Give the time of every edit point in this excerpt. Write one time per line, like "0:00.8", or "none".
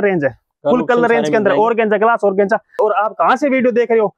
0:02.8